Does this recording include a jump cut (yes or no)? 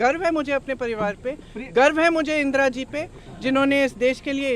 no